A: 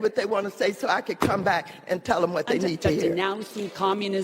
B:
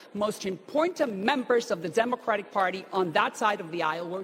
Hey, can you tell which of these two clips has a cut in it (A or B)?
A